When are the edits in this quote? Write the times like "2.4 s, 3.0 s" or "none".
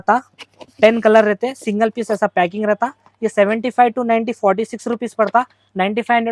none